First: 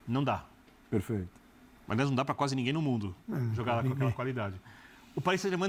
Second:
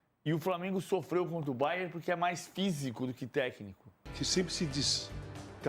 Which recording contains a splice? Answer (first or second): second